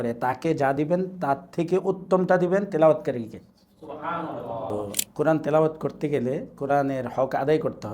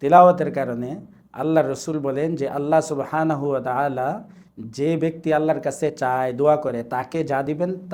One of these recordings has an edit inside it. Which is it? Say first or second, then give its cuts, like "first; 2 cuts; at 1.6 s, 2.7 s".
first; 1 cut; at 4.7 s